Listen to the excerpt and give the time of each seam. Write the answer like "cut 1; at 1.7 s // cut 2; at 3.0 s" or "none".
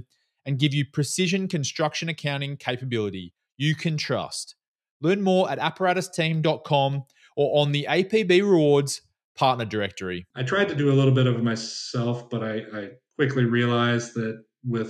cut 1; at 10.3 s